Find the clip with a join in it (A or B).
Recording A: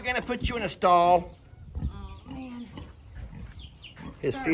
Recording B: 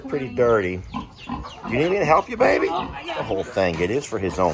B